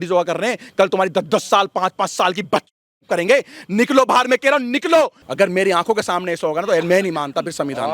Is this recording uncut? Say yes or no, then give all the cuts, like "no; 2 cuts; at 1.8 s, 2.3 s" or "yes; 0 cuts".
no; 1 cut; at 5.2 s